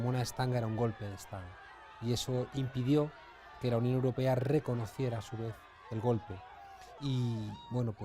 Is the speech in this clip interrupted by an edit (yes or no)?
yes